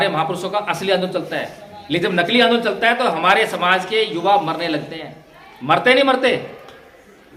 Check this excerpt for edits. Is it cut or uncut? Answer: uncut